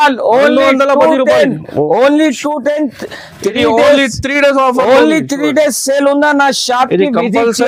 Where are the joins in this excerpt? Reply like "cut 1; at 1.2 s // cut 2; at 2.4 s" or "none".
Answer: none